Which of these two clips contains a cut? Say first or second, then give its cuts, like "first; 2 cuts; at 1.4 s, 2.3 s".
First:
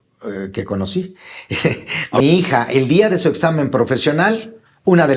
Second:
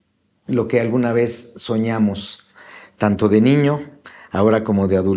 first; 1 cut; at 2.2 s